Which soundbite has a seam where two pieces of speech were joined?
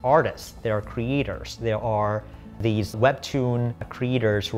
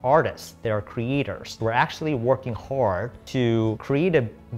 second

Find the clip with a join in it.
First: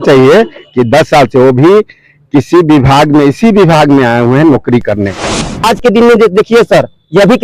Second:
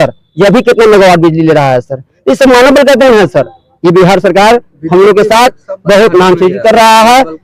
first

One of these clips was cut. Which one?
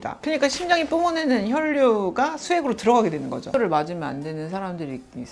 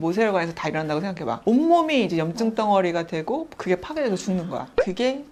first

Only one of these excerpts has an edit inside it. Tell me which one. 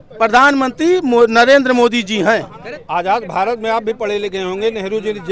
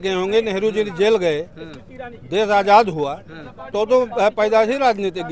first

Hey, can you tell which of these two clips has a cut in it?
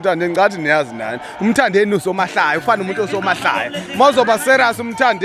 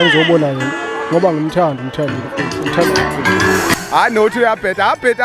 second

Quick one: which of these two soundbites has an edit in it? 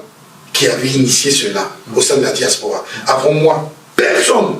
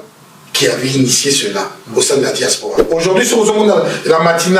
second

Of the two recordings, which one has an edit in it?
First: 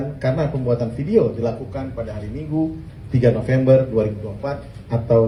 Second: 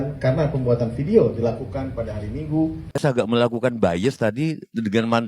second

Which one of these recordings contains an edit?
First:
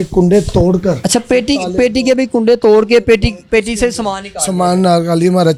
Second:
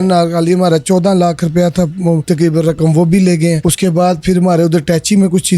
second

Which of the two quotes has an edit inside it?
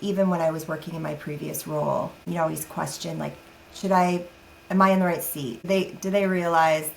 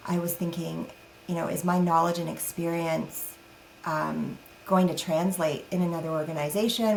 first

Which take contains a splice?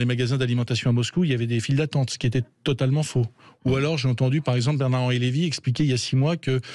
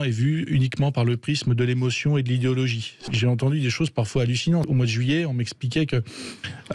second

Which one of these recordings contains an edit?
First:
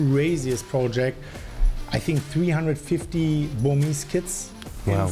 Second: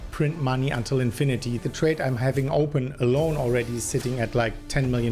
second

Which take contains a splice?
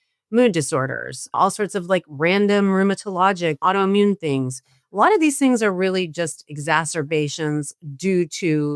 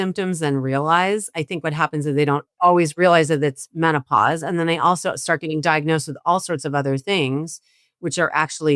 second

